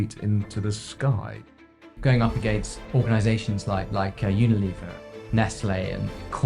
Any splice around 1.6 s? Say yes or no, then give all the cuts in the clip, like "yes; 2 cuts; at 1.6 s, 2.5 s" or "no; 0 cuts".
yes; 2 cuts; at 1.6 s, 2.8 s